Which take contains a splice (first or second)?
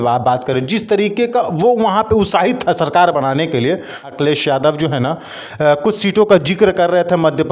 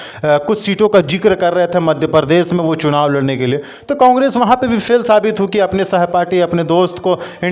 first